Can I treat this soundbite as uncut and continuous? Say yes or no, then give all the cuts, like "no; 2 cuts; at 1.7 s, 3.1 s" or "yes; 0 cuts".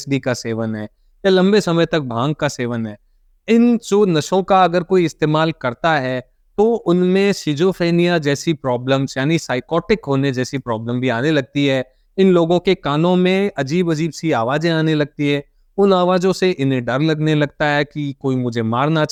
yes; 0 cuts